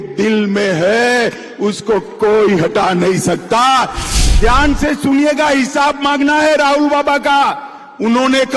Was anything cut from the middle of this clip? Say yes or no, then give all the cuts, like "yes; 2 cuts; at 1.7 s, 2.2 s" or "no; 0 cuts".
yes; 1 cut; at 4.0 s